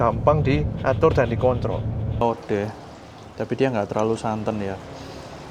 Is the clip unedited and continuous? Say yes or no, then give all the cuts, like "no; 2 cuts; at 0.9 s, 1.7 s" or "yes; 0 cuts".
no; 1 cut; at 2.2 s